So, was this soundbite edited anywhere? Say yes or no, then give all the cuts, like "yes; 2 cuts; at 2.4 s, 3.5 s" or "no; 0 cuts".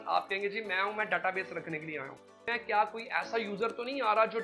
yes; 1 cut; at 2.5 s